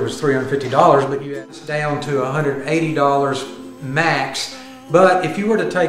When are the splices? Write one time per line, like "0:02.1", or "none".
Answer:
0:01.4